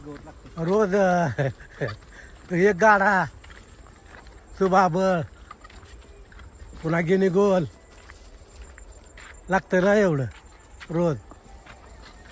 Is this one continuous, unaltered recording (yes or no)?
yes